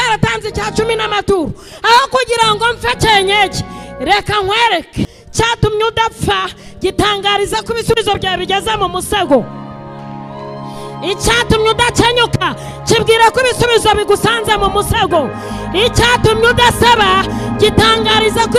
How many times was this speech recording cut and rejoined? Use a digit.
1